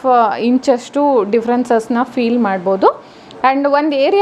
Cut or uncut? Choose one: uncut